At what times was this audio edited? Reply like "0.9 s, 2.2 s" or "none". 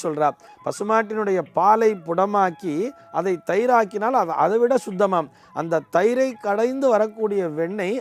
none